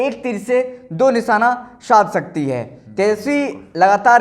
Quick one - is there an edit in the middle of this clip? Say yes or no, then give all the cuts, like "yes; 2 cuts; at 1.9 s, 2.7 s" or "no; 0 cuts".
no; 0 cuts